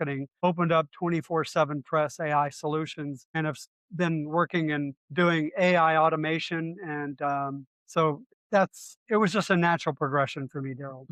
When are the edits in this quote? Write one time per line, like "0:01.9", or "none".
none